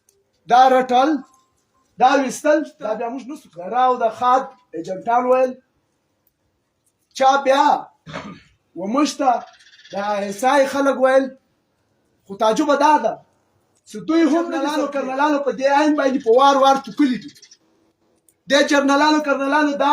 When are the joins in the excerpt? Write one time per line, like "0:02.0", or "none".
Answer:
0:03.2
0:14.8